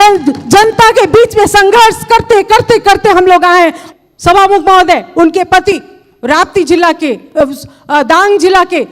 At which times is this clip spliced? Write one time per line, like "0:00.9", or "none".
0:03.8